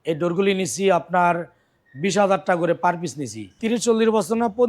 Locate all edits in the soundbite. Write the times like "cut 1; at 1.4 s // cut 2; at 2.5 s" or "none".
cut 1; at 3.6 s